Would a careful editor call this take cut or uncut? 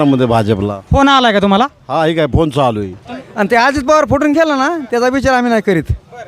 cut